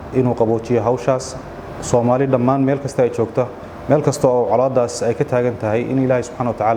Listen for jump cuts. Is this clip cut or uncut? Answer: uncut